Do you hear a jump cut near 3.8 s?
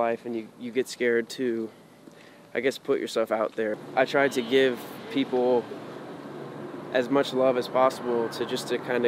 yes; 1 cut; at 3.8 s

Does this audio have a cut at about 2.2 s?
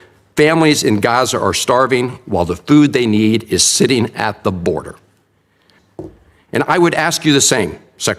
no; 1 cut; at 5.7 s

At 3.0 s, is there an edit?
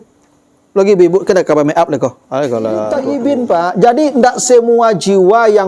yes; 1 cut; at 3.0 s

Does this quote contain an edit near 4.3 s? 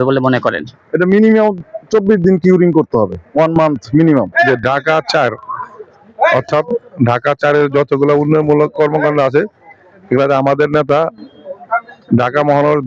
yes; 2 cuts; at 3.2 s, 4.3 s

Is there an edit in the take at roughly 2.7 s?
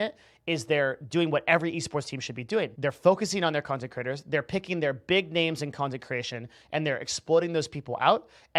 yes; 1 cut; at 2.7 s

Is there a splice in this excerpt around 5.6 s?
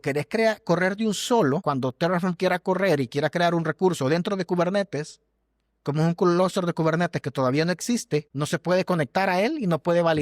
no; 2 cuts; at 1.6 s, 8.3 s

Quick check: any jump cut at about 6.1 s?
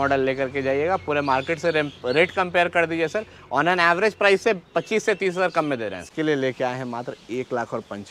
yes; 1 cut; at 6.1 s

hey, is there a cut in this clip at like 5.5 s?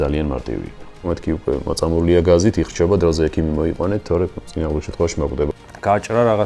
yes; 2 cuts; at 1.1 s, 5.5 s

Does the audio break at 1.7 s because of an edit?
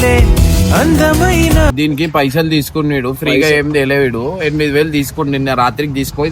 yes; 1 cut; at 1.7 s

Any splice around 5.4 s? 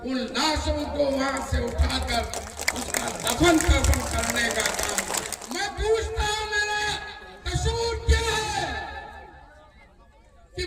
yes; 1 cut; at 5.4 s

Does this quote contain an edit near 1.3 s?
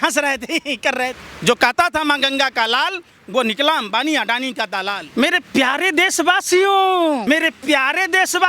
yes; 3 cuts; at 1.3 s, 5.0 s, 7.2 s

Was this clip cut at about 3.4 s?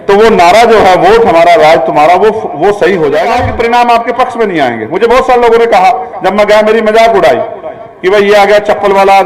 yes; 1 cut; at 3.4 s

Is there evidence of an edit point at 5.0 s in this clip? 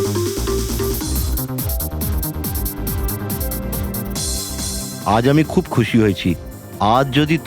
yes; 1 cut; at 5.0 s

